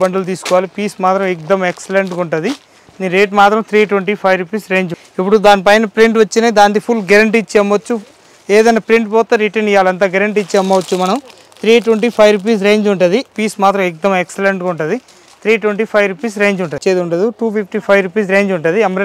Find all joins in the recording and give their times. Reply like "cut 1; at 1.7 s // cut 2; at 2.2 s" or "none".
cut 1; at 5.0 s // cut 2; at 13.4 s // cut 3; at 16.8 s